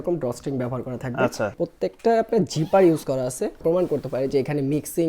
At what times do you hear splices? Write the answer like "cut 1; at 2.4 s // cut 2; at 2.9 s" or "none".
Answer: cut 1; at 1.5 s // cut 2; at 3.6 s